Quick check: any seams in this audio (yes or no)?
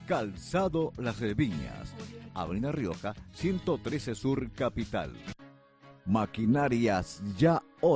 yes